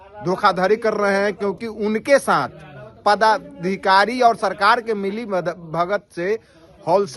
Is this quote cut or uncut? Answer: uncut